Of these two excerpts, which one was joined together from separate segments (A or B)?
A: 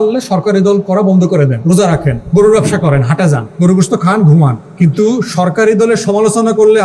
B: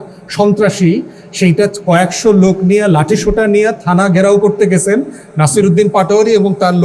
A